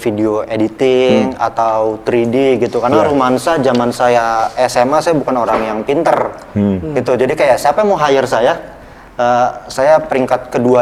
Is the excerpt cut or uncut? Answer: uncut